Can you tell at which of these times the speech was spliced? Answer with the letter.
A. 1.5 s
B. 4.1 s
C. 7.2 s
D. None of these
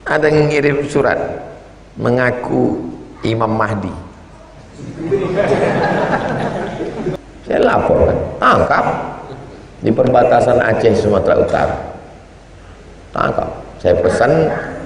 C